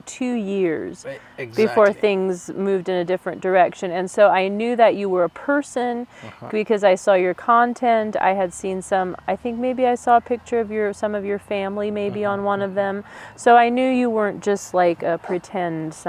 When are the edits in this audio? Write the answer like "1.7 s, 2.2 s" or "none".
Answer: none